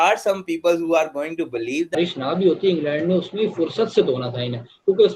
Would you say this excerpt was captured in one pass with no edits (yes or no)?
no